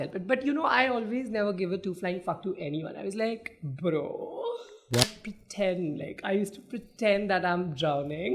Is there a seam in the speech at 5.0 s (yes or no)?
yes